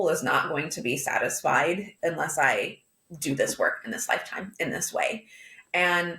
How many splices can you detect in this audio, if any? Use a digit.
1